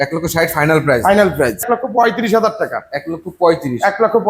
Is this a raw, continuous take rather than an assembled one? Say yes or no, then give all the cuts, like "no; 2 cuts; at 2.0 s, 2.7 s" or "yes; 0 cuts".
no; 1 cut; at 1.6 s